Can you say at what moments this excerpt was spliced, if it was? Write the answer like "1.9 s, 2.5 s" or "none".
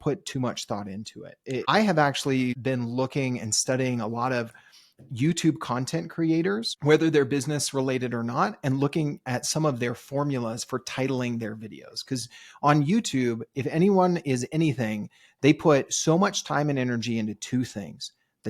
1.6 s, 2.6 s, 6.7 s